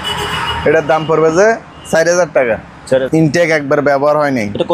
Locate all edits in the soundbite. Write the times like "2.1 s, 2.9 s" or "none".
3.1 s